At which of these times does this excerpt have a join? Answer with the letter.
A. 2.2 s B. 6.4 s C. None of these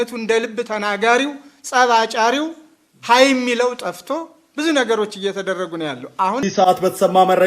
B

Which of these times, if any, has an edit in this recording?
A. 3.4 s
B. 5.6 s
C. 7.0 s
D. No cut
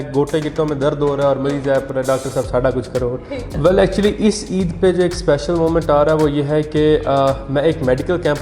A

